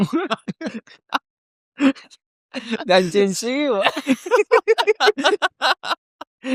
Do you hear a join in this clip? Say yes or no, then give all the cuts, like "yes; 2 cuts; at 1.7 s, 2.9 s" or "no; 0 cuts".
no; 0 cuts